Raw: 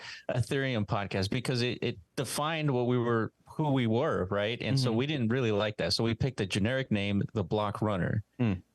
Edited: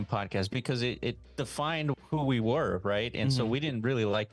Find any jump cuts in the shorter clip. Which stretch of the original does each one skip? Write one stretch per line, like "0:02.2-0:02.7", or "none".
0:02.7-0:03.4